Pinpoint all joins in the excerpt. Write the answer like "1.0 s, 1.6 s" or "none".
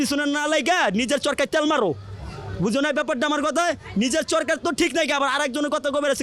none